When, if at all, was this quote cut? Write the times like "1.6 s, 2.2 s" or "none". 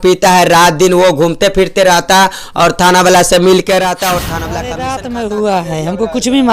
4.4 s